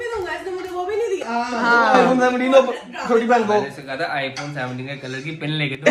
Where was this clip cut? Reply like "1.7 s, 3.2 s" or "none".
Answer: none